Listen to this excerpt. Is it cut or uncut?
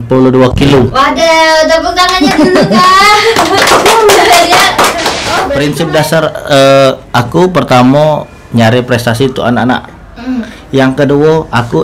cut